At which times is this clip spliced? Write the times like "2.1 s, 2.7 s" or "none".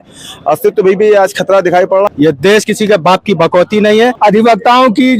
2.1 s, 4.1 s